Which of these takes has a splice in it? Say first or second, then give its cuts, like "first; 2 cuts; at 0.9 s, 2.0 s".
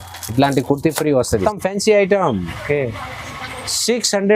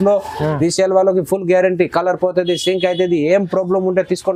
first; 1 cut; at 1.4 s